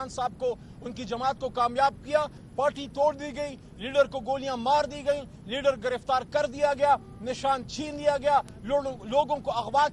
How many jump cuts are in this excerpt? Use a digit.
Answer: 1